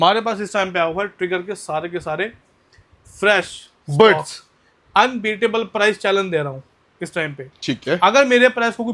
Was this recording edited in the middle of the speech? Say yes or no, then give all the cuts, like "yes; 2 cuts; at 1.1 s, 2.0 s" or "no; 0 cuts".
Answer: no; 0 cuts